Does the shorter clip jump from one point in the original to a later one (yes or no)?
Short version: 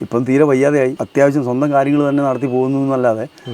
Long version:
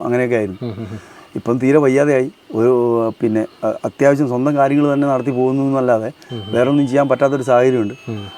yes